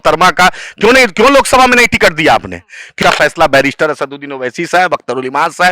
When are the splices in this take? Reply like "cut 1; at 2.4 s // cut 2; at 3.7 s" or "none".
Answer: cut 1; at 2.9 s

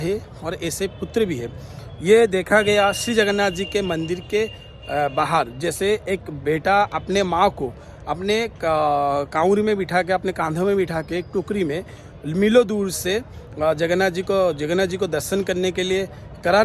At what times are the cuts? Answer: none

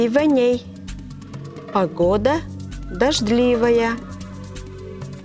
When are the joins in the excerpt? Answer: cut 1; at 4.0 s

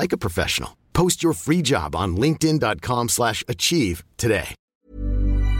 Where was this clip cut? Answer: cut 1; at 4.6 s

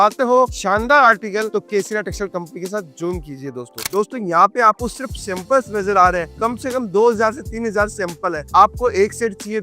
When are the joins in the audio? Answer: cut 1; at 3.8 s

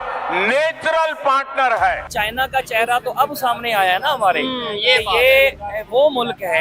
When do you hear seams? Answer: cut 1; at 2.1 s

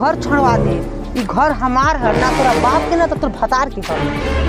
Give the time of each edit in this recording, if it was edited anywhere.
none

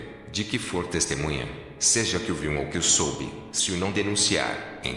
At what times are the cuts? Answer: none

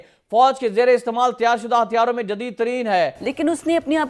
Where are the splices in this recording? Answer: cut 1; at 3.2 s

